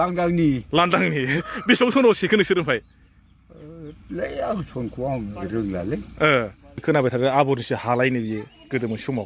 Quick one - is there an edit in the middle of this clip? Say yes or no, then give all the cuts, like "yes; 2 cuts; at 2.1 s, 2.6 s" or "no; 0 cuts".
yes; 1 cut; at 6.8 s